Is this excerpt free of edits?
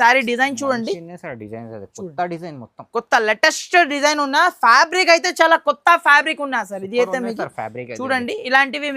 yes; 0 cuts

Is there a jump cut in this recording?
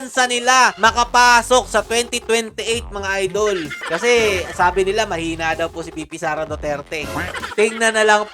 yes; 1 cut; at 3.8 s

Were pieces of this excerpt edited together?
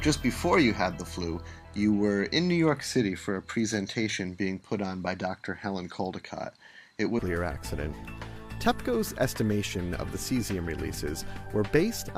no; 0 cuts

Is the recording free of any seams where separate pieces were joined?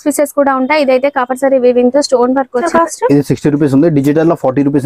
no; 1 cut; at 2.7 s

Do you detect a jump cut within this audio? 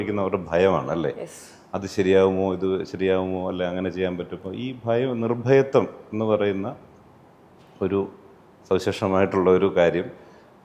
no; 0 cuts

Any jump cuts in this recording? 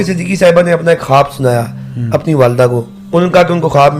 yes; 1 cut; at 3.0 s

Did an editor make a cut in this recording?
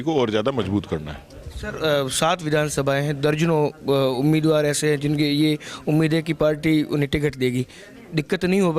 no; 0 cuts

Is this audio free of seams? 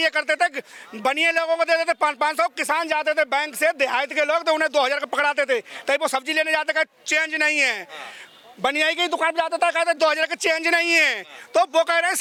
yes; 0 cuts

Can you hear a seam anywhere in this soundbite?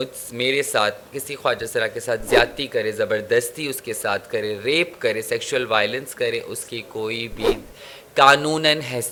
no; 0 cuts

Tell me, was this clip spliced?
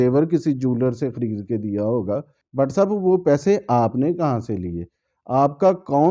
yes; 1 cut; at 2.4 s

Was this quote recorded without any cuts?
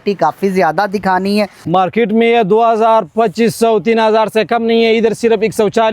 no; 1 cut; at 1.6 s

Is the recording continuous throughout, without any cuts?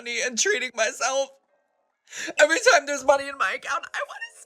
yes; 0 cuts

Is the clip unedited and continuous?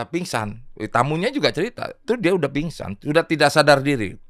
no; 1 cut; at 2.0 s

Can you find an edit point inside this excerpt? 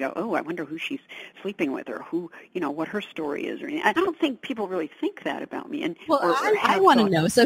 yes; 1 cut; at 3.9 s

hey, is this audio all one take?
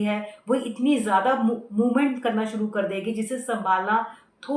yes; 0 cuts

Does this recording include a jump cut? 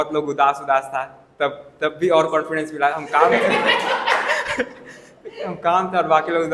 no; 0 cuts

